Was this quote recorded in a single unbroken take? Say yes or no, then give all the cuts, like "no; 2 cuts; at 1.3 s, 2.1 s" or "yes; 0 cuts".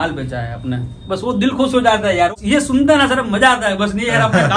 no; 1 cut; at 2.3 s